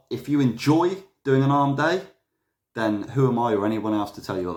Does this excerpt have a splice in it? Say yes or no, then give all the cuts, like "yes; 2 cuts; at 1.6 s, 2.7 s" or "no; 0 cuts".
no; 0 cuts